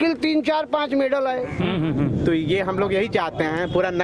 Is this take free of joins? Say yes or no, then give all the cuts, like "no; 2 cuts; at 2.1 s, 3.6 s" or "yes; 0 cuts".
no; 1 cut; at 1.6 s